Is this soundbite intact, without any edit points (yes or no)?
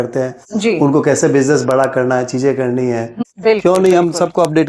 no